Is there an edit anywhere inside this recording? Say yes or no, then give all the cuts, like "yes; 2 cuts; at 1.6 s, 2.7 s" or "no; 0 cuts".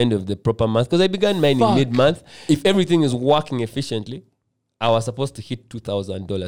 yes; 1 cut; at 2.4 s